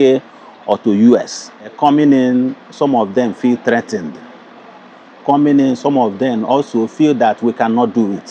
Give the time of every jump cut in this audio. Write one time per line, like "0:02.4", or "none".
0:01.7